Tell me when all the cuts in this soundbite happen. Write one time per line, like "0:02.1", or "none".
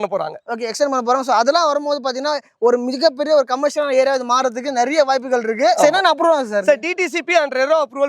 0:05.8